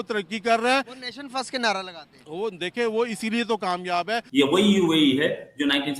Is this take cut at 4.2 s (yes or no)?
yes